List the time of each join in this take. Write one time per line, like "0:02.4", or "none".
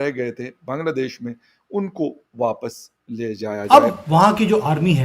0:03.6